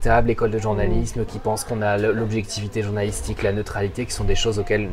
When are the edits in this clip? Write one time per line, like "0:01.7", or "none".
none